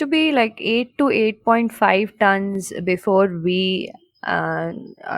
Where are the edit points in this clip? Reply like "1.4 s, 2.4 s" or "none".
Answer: none